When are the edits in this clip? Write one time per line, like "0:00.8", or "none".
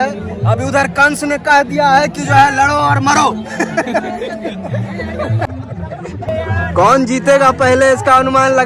0:05.6